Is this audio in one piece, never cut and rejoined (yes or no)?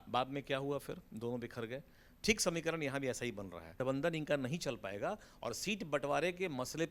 no